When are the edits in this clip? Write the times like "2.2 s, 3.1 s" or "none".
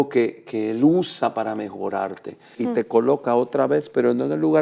2.6 s